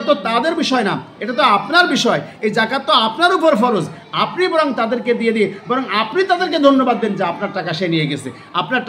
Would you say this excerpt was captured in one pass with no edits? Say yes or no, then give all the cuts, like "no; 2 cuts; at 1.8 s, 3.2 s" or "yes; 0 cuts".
yes; 0 cuts